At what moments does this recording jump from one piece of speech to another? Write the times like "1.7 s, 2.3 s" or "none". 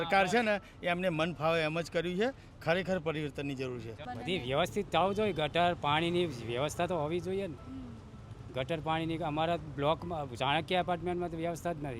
4.0 s

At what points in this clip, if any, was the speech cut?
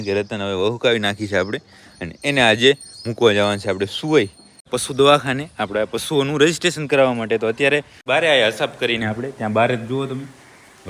4.7 s, 8.0 s

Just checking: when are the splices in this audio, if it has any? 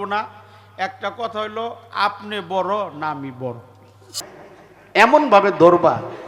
4.0 s

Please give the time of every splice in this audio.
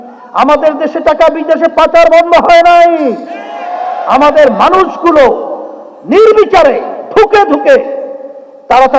none

